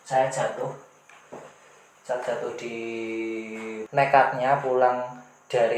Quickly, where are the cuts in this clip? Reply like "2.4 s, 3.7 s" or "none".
3.7 s